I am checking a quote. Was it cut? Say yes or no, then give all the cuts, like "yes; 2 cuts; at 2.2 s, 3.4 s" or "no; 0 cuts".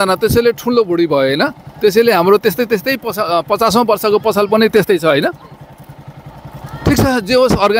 no; 0 cuts